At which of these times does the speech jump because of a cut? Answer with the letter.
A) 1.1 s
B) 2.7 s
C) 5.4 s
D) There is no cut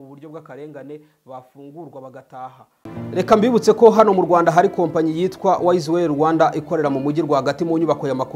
B